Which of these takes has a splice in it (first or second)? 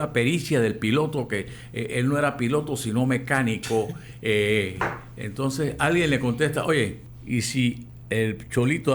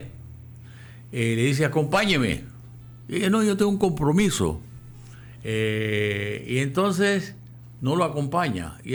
first